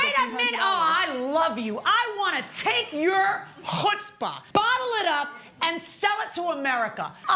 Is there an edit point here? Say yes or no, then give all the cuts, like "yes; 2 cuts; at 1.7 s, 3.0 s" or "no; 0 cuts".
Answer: no; 0 cuts